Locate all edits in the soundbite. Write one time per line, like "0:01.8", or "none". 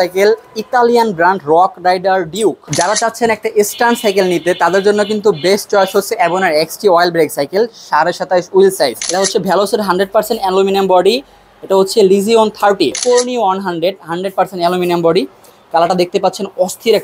0:02.6
0:09.0
0:13.0